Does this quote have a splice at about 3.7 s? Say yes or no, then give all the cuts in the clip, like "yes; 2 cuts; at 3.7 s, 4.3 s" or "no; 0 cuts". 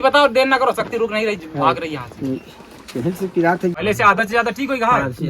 yes; 1 cut; at 3.7 s